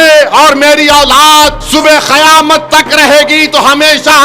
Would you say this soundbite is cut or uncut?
cut